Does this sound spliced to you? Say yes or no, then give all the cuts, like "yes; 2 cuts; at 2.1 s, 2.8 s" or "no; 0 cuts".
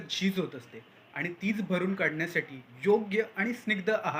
no; 0 cuts